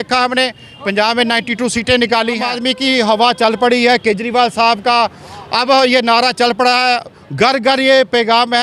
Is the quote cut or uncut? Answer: cut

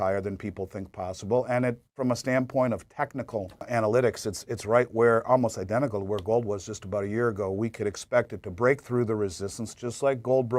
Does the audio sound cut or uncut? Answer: cut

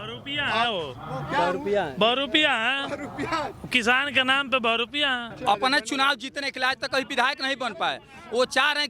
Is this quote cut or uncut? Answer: cut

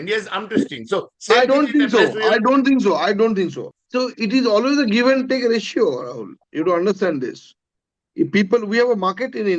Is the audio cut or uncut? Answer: cut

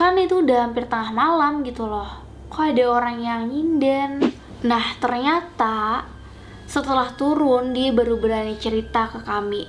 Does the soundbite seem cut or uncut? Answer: cut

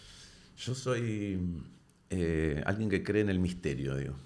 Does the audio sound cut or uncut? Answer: uncut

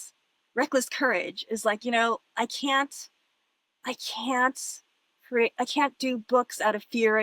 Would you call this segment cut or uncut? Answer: uncut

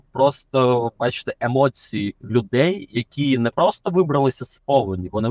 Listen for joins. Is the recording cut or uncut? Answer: uncut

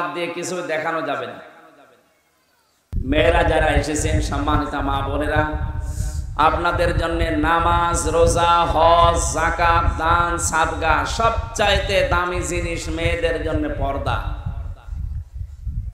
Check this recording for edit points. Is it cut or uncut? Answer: cut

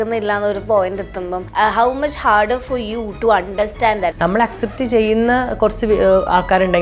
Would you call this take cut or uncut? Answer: cut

